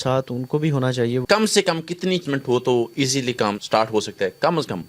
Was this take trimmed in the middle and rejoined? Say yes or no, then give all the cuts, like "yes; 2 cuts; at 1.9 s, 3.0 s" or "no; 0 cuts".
yes; 3 cuts; at 1.2 s, 2.2 s, 3.6 s